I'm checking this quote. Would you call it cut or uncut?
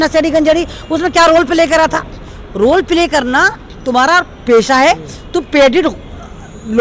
uncut